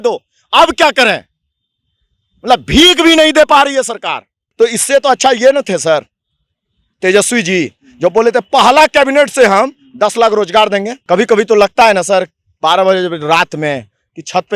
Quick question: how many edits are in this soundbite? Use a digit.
2